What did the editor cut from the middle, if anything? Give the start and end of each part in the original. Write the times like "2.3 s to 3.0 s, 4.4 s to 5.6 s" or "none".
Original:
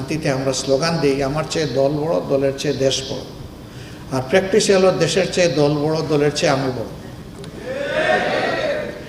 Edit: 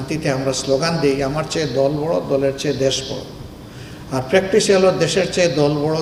none